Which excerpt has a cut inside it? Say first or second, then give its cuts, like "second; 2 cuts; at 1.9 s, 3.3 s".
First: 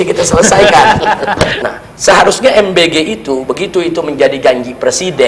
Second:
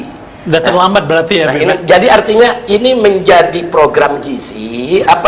first; 1 cut; at 1.3 s